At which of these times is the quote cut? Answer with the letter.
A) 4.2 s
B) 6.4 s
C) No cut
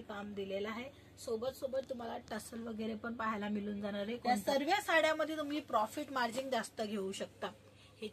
A